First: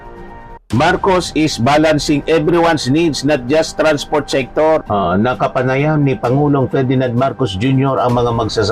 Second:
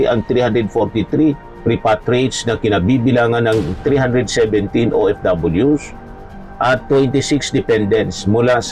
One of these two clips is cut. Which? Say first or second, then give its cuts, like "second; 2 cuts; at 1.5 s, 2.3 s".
first; 1 cut; at 4.8 s